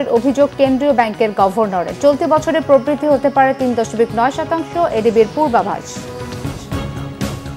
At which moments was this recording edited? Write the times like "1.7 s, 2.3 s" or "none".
6.6 s